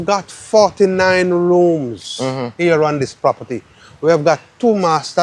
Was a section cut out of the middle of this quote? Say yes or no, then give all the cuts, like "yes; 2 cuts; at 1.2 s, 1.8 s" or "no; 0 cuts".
no; 0 cuts